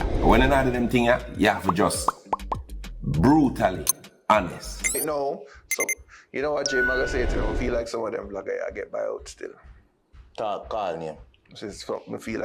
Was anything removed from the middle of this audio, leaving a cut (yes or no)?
yes